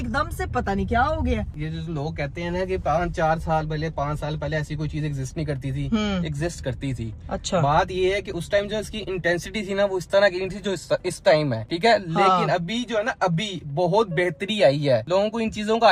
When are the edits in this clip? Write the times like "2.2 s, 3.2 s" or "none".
none